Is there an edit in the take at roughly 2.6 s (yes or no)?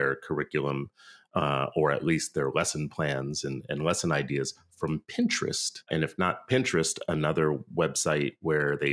no